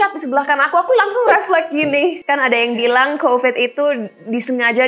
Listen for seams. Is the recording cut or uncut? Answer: cut